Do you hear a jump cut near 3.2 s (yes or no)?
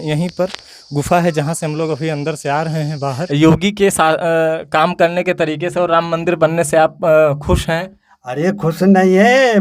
yes